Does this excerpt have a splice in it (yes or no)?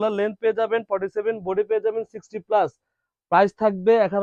no